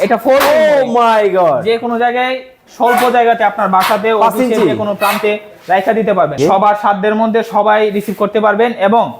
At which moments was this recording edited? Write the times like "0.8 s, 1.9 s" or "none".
6.3 s